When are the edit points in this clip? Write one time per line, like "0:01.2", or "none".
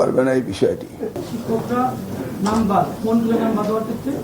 0:01.3